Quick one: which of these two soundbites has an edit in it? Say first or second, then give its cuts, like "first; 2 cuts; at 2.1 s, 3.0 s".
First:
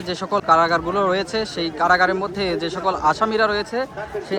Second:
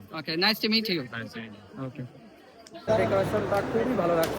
second; 1 cut; at 2.9 s